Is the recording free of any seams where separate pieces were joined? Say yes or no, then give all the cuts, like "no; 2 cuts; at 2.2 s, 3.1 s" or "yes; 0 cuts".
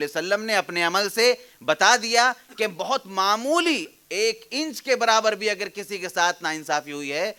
yes; 0 cuts